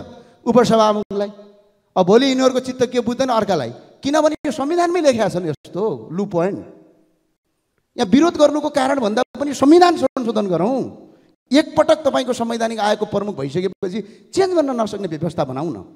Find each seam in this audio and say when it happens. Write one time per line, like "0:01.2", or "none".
none